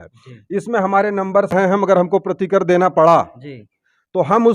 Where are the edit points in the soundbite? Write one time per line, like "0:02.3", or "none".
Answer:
0:01.5